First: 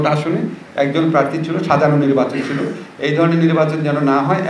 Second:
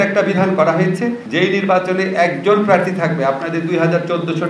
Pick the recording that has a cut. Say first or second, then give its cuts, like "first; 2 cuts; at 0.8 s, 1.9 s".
second; 1 cut; at 1.2 s